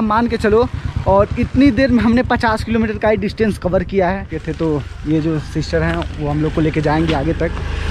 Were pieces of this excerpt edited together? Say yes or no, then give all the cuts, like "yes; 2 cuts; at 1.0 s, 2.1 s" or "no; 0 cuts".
yes; 1 cut; at 4.4 s